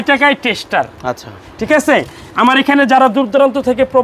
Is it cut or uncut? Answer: uncut